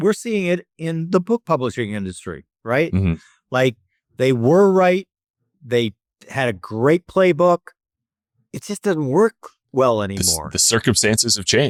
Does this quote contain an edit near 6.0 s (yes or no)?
no